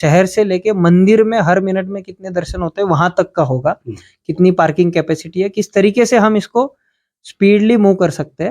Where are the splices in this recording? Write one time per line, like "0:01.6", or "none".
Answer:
none